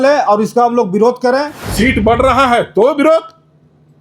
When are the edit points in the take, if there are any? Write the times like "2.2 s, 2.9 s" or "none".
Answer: 1.6 s